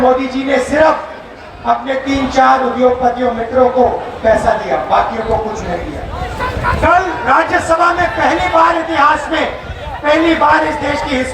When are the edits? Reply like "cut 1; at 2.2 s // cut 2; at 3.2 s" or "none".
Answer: cut 1; at 6.3 s